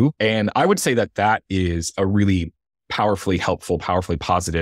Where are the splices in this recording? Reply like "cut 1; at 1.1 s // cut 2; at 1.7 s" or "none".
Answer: none